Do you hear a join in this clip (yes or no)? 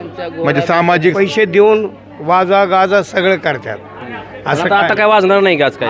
yes